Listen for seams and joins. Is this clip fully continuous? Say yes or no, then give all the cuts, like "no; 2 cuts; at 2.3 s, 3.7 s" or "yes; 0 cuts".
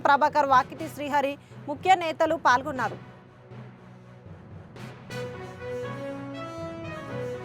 yes; 0 cuts